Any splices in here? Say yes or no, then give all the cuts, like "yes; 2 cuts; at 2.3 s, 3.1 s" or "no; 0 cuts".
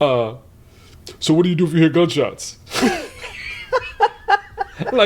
no; 0 cuts